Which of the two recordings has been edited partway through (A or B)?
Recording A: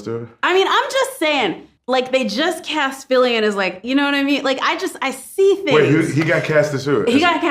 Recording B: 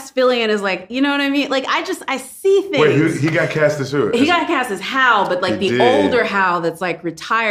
A